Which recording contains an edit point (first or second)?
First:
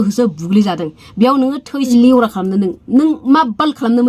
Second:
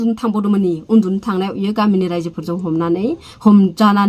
first